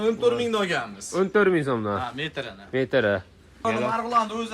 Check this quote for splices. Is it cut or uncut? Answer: cut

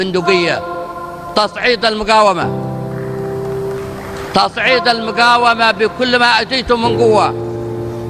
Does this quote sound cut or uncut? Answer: uncut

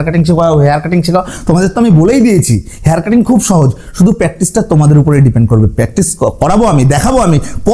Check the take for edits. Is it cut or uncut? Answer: uncut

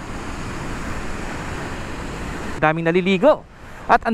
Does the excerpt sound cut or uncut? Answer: cut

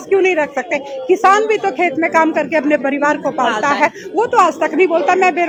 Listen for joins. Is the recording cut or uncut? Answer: uncut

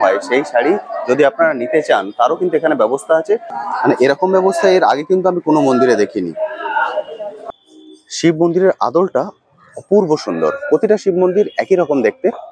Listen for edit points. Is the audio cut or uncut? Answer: cut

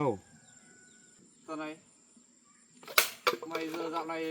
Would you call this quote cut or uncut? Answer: cut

